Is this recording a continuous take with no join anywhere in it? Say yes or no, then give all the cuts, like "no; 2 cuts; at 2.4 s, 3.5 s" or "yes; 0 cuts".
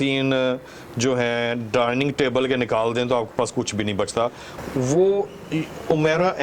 no; 1 cut; at 4.5 s